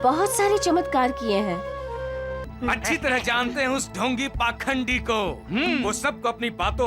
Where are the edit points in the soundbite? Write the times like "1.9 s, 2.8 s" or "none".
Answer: 2.4 s